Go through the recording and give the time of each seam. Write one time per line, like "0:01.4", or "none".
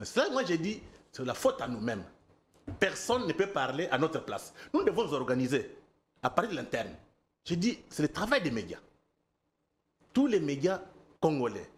none